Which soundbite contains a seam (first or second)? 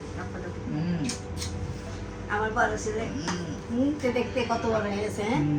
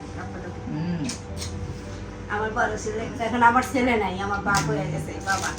second